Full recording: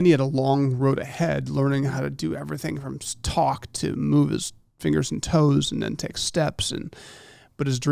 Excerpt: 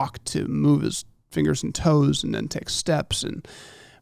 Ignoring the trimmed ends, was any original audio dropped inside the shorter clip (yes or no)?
no